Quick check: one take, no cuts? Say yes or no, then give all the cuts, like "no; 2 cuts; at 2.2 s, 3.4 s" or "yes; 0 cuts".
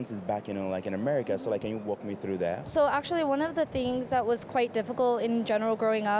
yes; 0 cuts